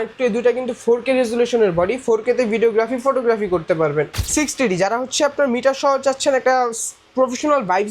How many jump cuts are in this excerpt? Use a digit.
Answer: 1